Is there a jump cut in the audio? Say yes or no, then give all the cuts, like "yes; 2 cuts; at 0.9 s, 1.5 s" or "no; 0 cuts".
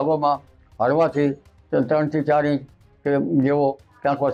no; 0 cuts